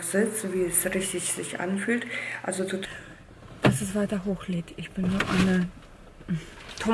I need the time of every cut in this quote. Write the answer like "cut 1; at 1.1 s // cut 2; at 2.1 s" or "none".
cut 1; at 2.8 s